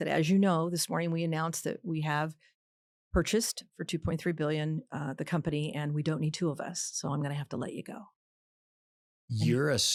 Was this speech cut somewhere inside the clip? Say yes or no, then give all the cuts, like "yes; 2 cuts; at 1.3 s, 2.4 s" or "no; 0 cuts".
no; 0 cuts